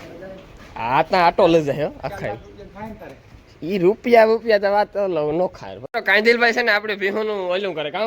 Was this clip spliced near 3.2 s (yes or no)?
no